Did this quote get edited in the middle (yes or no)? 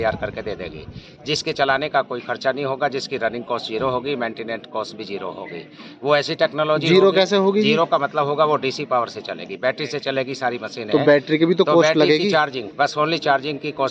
no